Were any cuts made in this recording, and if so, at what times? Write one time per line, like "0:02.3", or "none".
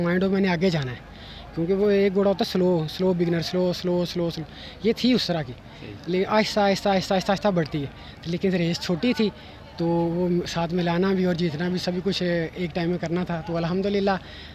none